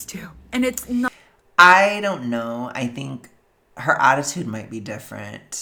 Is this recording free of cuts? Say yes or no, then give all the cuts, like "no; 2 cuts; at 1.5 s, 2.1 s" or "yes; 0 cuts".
yes; 0 cuts